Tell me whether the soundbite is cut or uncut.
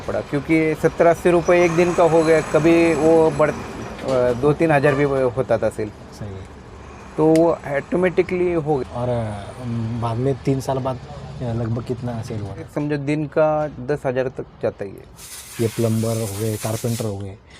cut